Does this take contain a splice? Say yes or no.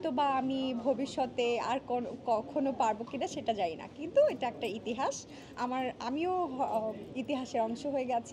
no